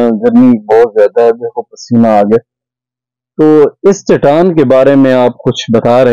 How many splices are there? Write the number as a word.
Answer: zero